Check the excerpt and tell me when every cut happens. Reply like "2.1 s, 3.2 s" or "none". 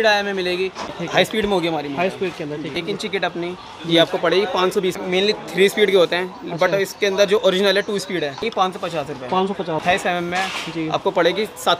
0.9 s, 2.7 s, 5.0 s, 8.5 s, 9.8 s